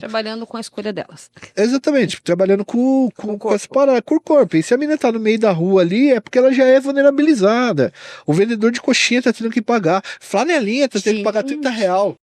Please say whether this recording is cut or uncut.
uncut